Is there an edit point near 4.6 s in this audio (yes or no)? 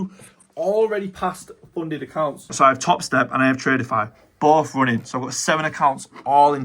no